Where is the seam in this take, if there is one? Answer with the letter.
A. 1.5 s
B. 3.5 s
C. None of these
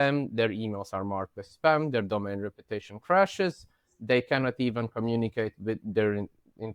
C